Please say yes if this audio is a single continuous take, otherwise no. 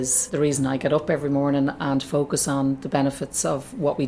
yes